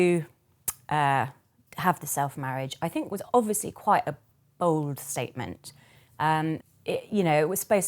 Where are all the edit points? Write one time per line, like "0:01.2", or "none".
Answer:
0:06.7